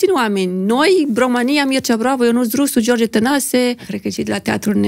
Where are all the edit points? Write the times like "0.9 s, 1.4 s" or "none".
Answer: 3.9 s